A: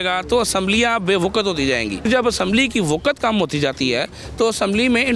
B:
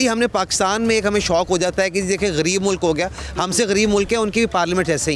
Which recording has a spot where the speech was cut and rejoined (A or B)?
A